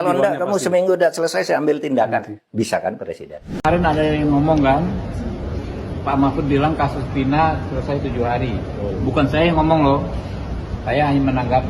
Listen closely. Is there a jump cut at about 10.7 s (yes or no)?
no